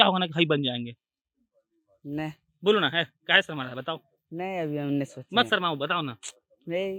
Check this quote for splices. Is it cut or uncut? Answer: uncut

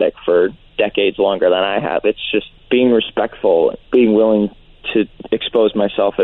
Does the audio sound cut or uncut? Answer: cut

